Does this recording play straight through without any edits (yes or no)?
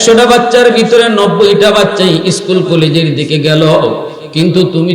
yes